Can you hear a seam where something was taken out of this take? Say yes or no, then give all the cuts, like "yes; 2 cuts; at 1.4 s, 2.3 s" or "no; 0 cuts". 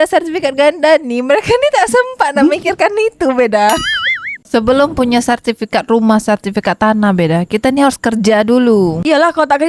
yes; 1 cut; at 4.4 s